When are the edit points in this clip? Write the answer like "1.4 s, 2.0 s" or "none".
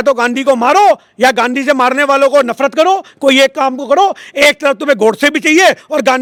none